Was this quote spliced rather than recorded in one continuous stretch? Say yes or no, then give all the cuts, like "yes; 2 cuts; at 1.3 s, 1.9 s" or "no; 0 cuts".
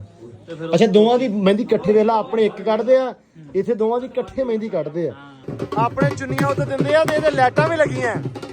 yes; 1 cut; at 5.4 s